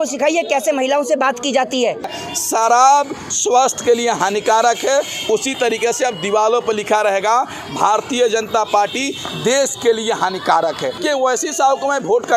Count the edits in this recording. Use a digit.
2